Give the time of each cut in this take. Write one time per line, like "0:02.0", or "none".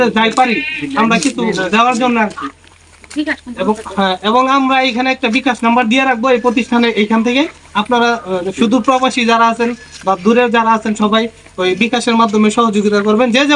none